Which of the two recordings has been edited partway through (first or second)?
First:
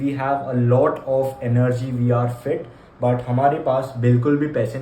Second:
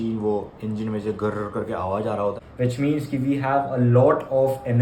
second